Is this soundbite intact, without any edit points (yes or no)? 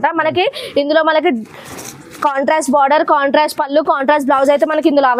yes